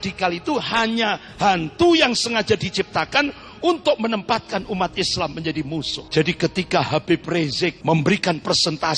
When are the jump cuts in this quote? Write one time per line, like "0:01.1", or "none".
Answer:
0:06.0
0:07.8